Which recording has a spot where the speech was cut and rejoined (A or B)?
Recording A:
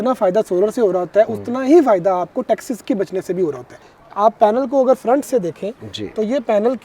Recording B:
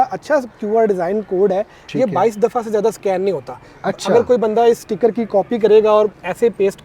A